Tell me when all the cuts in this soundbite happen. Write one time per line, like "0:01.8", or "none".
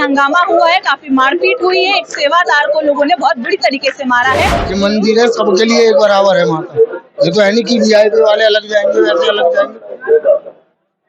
0:04.6